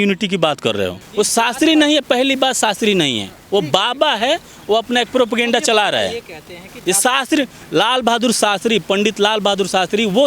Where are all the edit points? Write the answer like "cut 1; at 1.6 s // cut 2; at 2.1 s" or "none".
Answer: cut 1; at 1.0 s